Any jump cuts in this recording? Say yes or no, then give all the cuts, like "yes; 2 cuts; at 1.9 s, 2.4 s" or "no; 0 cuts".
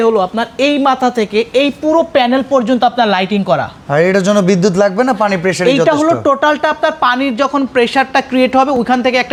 no; 0 cuts